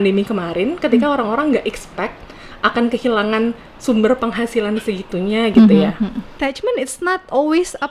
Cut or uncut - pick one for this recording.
cut